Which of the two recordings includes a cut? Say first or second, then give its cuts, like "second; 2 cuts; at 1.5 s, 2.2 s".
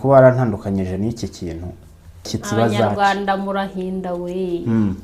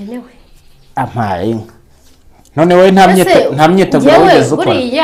first; 1 cut; at 2.4 s